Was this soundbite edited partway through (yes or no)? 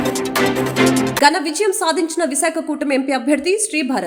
no